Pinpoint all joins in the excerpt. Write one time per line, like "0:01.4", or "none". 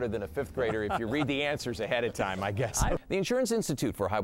0:03.0